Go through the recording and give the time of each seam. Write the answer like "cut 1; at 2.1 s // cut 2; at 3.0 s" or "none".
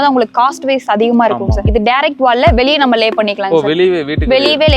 cut 1; at 1.6 s